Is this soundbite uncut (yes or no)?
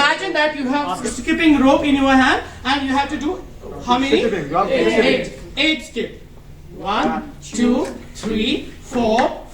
no